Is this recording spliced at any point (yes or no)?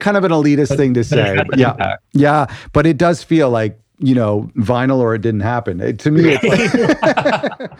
yes